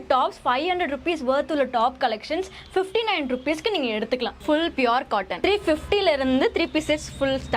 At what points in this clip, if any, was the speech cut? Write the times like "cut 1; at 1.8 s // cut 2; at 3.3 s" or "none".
cut 1; at 4.4 s // cut 2; at 5.3 s